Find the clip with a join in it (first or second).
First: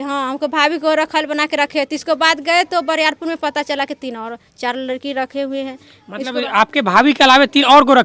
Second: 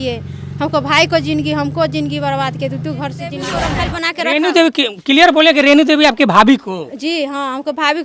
second